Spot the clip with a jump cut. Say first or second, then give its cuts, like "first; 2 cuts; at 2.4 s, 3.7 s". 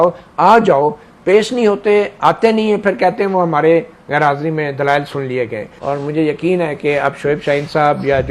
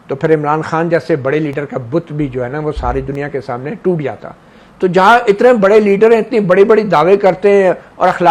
first; 1 cut; at 5.7 s